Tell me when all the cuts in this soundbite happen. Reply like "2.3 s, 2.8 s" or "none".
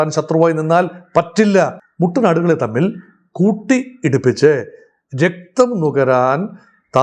1.8 s